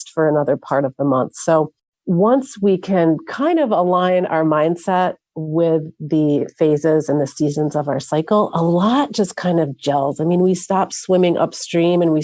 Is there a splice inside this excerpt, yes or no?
no